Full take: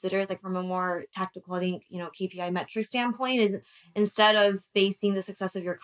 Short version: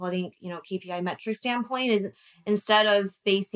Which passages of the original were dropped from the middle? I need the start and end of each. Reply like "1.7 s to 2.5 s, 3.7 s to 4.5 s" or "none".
none